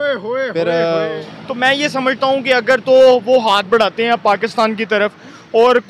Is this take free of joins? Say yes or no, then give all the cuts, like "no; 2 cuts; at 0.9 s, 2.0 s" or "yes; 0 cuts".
no; 1 cut; at 1.2 s